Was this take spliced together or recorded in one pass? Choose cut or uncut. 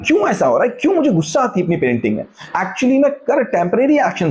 cut